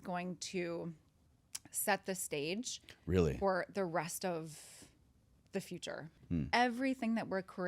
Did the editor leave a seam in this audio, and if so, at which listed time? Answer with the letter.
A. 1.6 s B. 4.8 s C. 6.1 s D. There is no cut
C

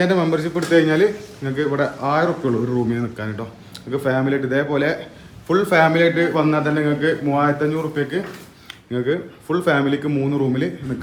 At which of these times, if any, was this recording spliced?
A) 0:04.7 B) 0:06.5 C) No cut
C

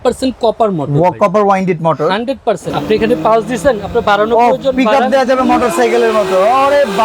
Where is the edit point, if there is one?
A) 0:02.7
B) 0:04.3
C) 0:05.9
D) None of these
A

